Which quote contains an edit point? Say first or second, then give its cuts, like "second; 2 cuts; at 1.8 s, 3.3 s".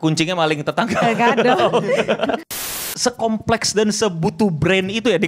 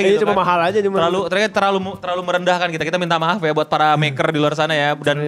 first; 1 cut; at 2.5 s